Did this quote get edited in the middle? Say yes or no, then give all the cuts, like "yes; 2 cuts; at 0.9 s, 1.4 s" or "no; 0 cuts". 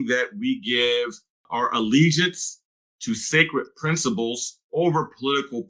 yes; 1 cut; at 1.5 s